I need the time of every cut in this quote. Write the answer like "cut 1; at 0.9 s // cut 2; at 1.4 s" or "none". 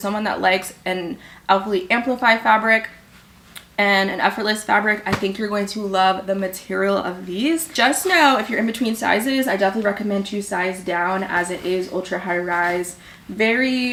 none